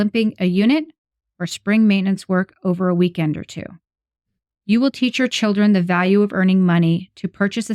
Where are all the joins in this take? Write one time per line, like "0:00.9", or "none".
none